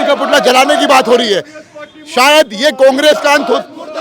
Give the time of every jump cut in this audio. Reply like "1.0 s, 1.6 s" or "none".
none